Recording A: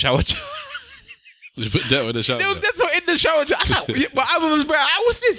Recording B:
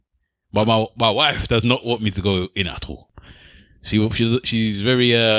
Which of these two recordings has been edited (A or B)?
B